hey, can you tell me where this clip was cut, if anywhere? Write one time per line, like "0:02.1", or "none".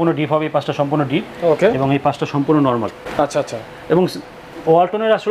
none